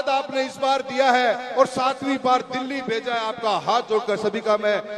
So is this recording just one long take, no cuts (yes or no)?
yes